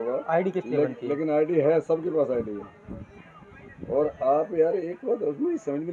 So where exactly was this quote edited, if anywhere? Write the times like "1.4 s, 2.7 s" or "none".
none